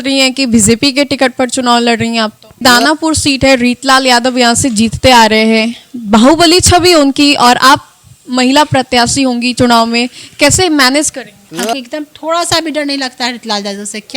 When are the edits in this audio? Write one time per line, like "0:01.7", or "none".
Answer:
0:02.6
0:11.4